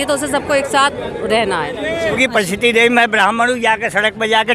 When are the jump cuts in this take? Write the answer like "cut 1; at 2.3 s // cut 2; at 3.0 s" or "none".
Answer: cut 1; at 2.2 s